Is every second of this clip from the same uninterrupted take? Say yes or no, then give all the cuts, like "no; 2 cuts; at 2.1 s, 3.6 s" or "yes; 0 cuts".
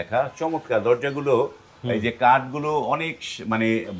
yes; 0 cuts